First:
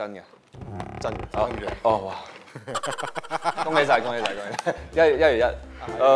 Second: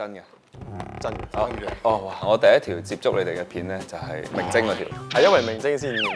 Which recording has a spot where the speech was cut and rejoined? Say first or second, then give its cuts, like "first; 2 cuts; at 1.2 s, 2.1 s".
second; 2 cuts; at 2.2 s, 4.3 s